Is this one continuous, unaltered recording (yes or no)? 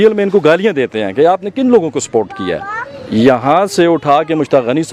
yes